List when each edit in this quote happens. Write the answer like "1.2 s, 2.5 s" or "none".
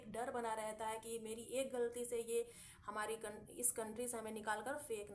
none